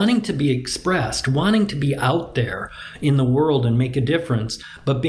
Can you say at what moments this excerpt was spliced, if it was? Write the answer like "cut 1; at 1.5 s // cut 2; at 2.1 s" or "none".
none